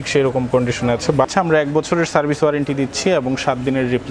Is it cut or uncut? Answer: cut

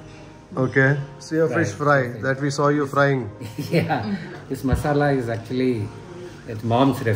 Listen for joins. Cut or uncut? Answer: cut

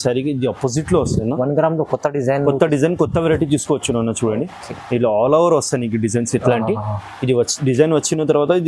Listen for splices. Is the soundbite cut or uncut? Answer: uncut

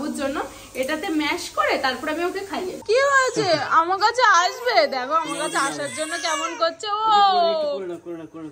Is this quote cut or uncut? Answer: cut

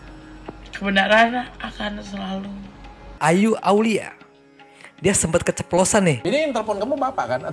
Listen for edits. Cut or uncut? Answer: cut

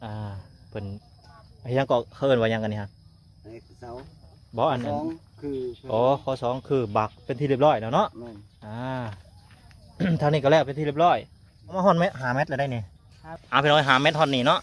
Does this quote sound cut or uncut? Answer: cut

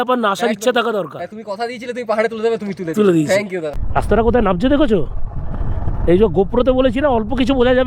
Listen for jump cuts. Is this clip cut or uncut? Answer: cut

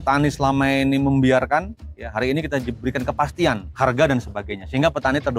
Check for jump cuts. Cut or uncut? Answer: cut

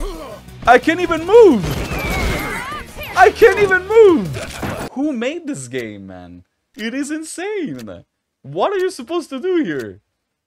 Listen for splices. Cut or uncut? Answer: cut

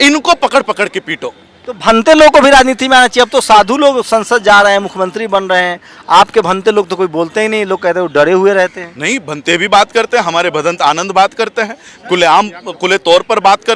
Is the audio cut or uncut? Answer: uncut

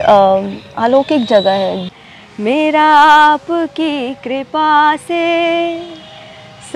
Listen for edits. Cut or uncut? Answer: cut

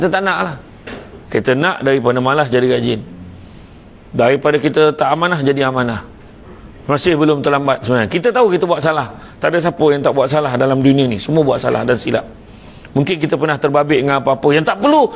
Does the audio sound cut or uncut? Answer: uncut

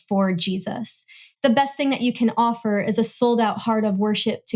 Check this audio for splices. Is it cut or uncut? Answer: cut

